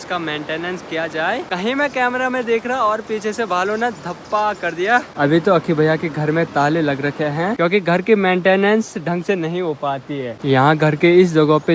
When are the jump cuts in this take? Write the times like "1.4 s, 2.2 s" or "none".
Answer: 1.5 s, 5.1 s, 7.6 s, 10.4 s